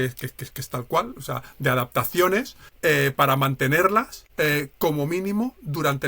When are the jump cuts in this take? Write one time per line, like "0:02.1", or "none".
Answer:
0:02.6
0:04.2